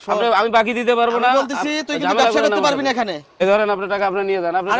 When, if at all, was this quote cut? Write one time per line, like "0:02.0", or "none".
0:03.3